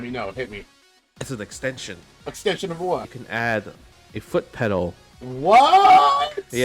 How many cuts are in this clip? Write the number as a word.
three